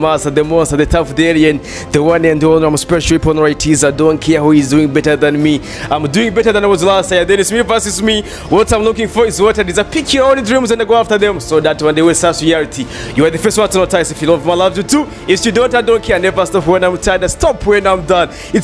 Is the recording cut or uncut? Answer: uncut